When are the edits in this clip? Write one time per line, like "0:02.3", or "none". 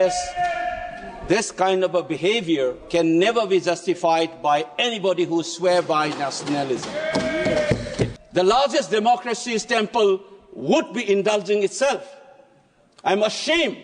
0:08.1